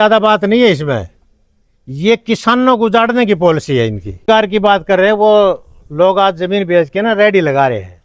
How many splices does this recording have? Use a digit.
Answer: 1